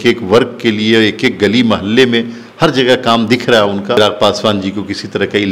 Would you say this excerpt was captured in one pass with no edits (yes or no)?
no